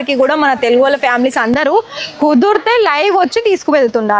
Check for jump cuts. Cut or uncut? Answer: uncut